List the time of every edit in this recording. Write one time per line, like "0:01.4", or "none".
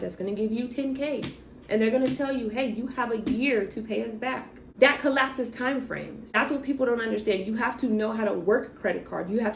none